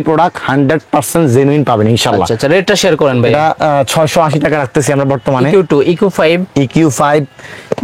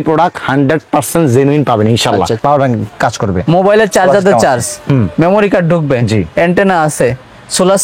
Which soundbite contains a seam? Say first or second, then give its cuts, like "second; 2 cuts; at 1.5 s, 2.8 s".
second; 1 cut; at 2.4 s